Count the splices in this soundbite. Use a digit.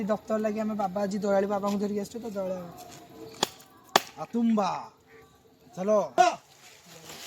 1